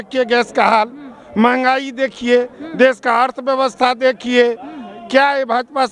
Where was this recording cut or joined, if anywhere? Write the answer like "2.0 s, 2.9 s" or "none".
none